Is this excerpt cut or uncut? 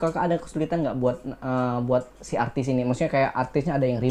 uncut